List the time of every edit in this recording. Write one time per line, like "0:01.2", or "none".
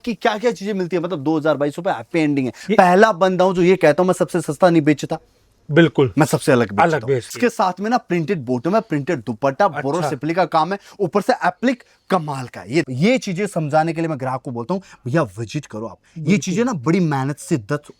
0:02.5
0:07.3
0:12.8